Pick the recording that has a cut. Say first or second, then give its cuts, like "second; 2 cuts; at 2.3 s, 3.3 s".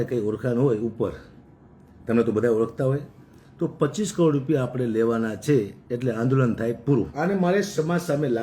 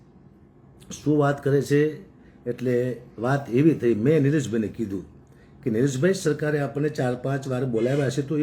first; 1 cut; at 7.1 s